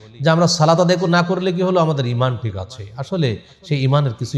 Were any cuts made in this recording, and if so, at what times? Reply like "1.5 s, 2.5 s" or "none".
none

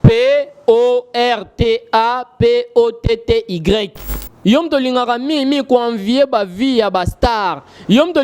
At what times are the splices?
4.3 s

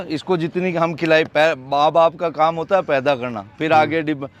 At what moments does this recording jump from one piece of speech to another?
none

